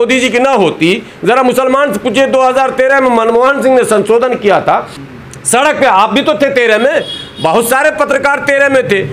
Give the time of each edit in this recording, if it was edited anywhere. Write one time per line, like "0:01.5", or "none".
0:04.9

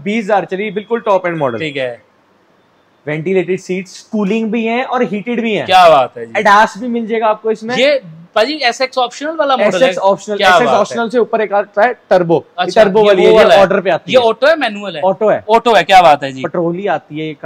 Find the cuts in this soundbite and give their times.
none

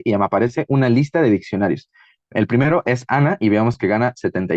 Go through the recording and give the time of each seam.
none

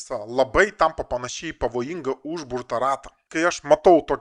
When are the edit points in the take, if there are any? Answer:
0:03.2

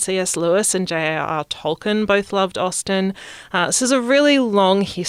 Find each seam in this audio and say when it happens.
none

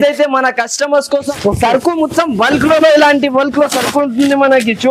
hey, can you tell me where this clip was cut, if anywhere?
0:01.3

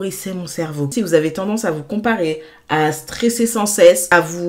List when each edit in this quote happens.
0:00.9

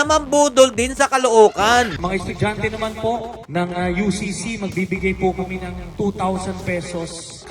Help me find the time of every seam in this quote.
0:02.0

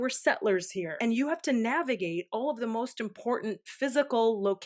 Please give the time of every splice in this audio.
0:01.0

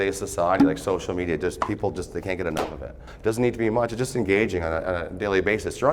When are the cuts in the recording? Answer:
0:03.0

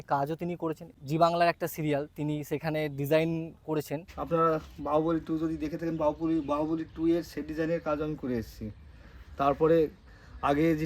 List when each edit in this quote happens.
0:00.9
0:04.1

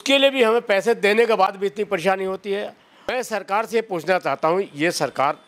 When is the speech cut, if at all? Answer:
0:03.1

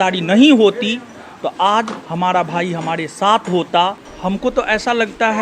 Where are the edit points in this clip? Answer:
0:04.1

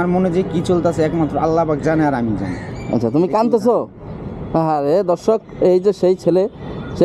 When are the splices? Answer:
none

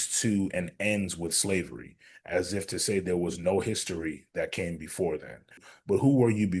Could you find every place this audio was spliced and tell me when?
0:05.7

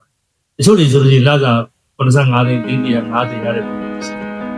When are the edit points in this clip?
0:03.6

